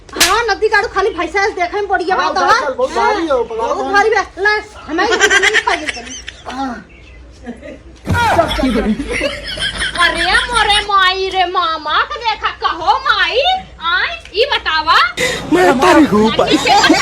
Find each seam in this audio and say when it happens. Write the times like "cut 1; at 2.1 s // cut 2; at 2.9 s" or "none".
cut 1; at 15.1 s